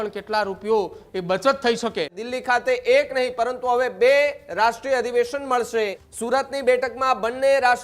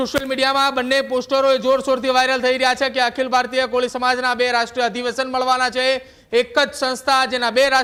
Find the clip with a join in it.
first; 2 cuts; at 2.2 s, 6.1 s

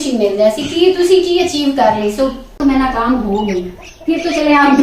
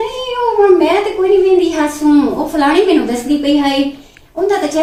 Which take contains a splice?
first; 1 cut; at 2.6 s

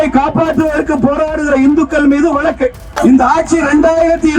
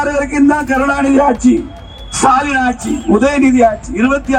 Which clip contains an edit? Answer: first; 1 cut; at 2.9 s

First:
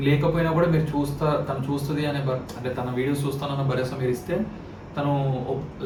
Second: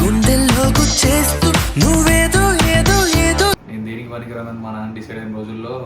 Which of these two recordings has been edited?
second; 1 cut; at 3.6 s

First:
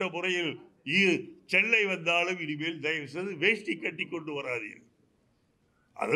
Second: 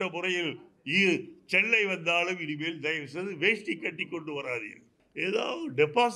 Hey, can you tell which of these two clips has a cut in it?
second; 1 cut; at 5.0 s

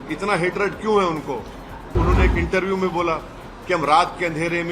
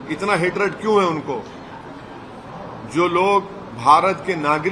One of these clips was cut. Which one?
first; 1 cut; at 1.9 s

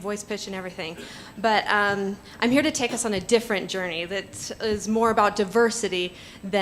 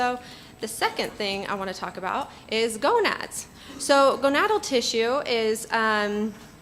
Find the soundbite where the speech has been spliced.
first; 1 cut; at 1.8 s

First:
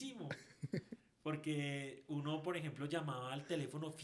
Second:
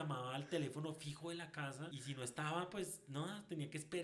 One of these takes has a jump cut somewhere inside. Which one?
second; 1 cut; at 2.0 s

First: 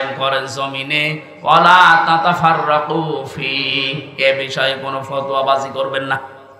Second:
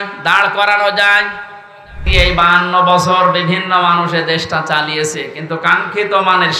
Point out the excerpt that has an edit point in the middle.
second; 1 cut; at 2.1 s

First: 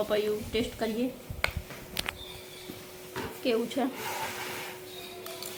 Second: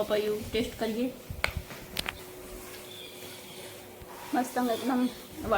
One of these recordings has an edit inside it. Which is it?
second; 1 cut; at 2.2 s

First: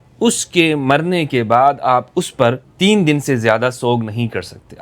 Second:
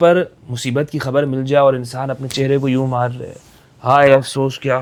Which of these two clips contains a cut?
first; 1 cut; at 2.7 s

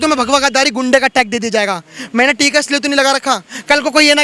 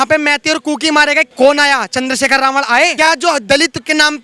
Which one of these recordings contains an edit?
second; 2 cuts; at 1.3 s, 2.9 s

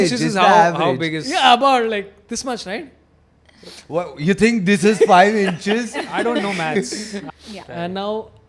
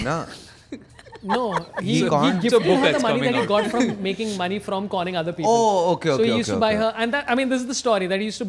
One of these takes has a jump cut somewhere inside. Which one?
first; 1 cut; at 7.2 s

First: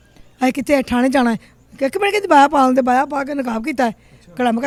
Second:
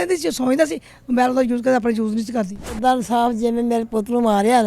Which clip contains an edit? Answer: second; 1 cut; at 2.7 s

